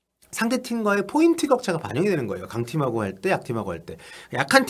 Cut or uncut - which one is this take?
uncut